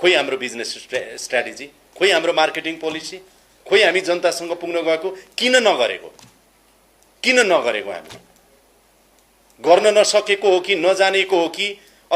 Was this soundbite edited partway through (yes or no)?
no